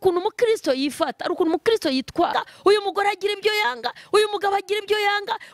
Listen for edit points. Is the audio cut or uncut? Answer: cut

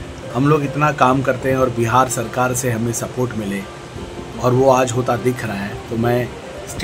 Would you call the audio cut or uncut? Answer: uncut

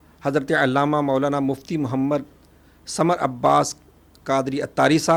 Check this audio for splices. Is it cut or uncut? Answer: uncut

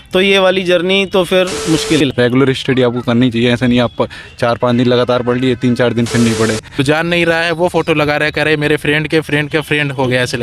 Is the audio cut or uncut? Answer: cut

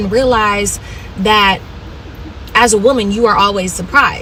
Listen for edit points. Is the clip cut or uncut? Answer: uncut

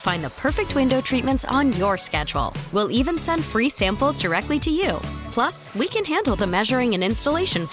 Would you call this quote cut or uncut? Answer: uncut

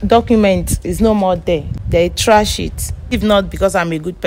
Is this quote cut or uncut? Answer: cut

